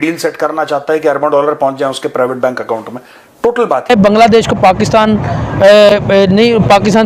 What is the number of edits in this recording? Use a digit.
1